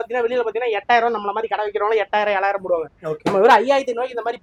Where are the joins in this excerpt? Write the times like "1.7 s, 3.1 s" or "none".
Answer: none